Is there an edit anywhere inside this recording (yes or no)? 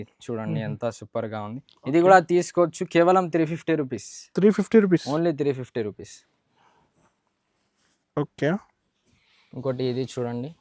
no